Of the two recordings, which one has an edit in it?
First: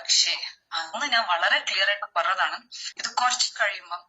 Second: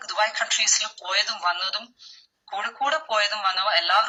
first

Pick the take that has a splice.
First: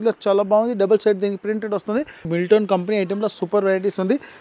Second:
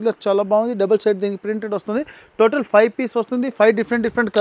first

